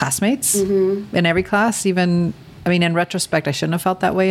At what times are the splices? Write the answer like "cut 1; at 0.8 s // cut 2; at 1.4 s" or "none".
cut 1; at 2.5 s